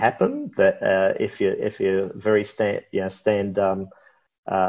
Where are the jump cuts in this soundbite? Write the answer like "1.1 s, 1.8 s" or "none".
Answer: none